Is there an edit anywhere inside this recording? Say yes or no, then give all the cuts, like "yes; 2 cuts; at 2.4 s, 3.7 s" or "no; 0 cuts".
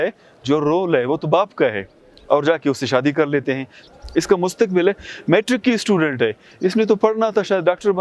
yes; 1 cut; at 3.8 s